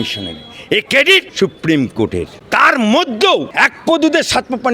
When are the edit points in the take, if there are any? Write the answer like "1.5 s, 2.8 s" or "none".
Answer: 1.3 s, 2.4 s, 3.5 s